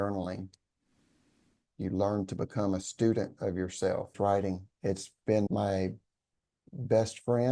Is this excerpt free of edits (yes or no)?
no